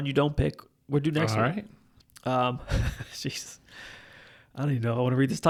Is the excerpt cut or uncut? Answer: uncut